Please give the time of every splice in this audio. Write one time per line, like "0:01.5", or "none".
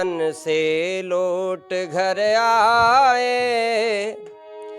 none